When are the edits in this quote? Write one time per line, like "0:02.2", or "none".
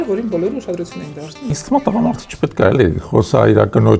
0:01.4